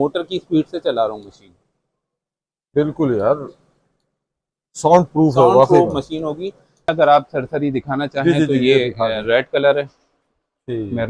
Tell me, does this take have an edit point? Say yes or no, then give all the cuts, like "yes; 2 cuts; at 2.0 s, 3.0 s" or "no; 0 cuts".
yes; 1 cut; at 6.9 s